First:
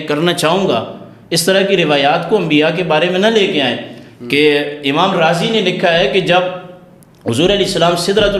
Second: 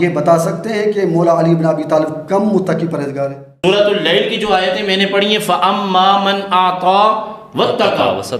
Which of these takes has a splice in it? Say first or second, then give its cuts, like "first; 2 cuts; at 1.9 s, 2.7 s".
second; 1 cut; at 3.4 s